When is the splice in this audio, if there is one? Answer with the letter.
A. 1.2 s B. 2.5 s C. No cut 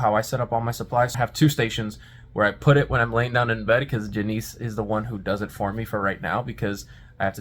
A